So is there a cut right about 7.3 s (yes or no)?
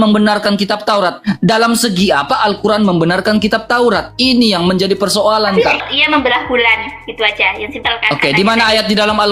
no